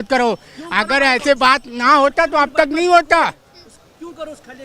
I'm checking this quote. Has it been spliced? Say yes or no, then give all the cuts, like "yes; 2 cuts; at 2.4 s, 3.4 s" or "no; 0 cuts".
no; 0 cuts